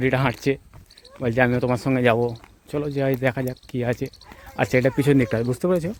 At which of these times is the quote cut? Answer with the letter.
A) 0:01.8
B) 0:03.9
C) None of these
C